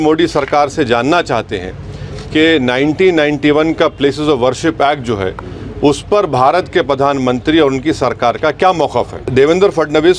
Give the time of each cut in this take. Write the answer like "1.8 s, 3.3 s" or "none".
9.2 s